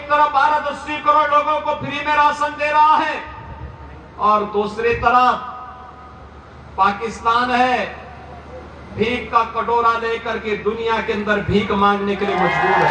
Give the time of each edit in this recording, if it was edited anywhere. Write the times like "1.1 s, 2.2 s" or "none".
none